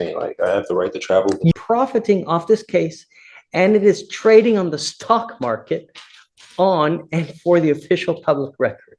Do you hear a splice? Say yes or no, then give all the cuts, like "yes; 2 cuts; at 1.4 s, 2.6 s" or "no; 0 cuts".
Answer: yes; 1 cut; at 1.5 s